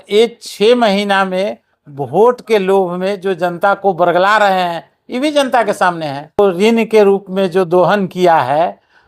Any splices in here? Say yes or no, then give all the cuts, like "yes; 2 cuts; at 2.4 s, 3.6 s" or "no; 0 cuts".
yes; 1 cut; at 6.4 s